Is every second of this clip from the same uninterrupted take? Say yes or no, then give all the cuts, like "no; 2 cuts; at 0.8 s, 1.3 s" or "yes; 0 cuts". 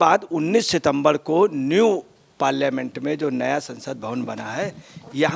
yes; 0 cuts